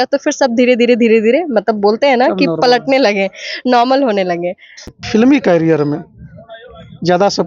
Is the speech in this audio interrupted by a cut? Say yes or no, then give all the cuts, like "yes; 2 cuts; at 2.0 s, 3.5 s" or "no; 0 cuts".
yes; 1 cut; at 5.0 s